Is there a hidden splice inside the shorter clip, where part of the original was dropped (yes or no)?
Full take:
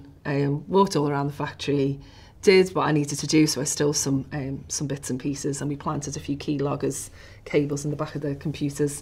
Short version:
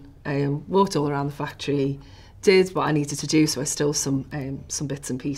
no